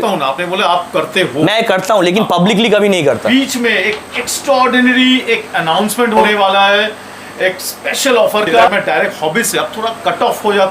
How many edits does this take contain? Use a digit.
3